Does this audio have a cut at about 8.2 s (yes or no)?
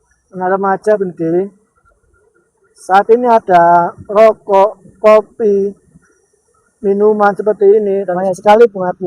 yes